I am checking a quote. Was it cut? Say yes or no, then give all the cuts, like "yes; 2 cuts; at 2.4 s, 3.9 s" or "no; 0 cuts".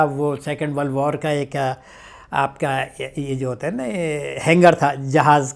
no; 0 cuts